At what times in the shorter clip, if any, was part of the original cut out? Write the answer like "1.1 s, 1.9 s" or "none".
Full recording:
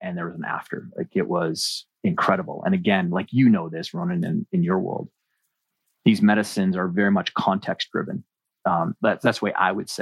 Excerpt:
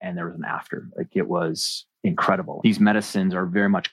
2.5 s

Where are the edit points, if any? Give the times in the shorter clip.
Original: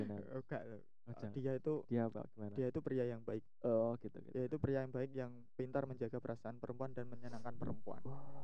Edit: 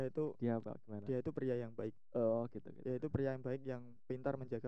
none

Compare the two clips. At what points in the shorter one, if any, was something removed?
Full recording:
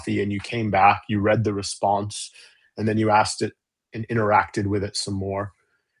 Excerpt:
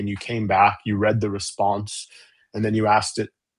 none

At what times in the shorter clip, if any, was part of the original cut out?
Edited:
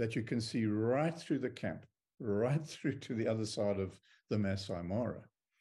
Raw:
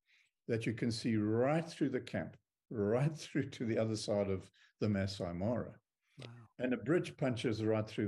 none

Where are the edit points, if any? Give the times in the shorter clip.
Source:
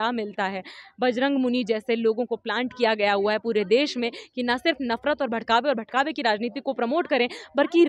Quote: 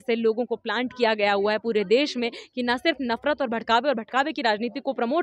none

